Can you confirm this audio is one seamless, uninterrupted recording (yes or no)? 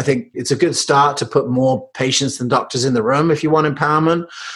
yes